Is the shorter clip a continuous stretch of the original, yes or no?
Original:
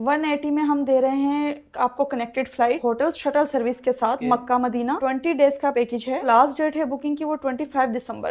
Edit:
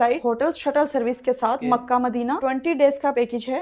yes